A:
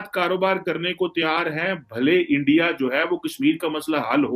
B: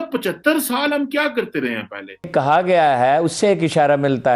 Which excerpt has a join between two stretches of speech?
B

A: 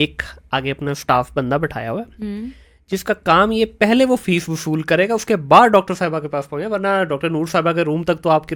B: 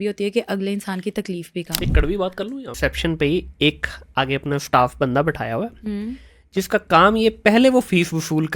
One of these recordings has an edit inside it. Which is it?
B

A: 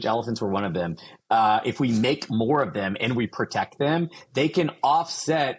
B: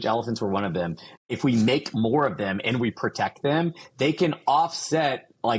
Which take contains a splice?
B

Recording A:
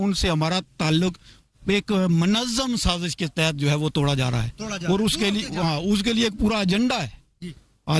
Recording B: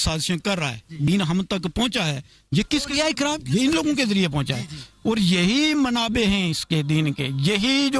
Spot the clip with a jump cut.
B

